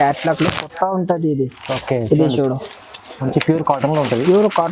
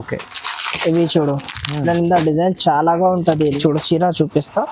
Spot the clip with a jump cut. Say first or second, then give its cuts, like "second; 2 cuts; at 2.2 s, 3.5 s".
second; 1 cut; at 3.6 s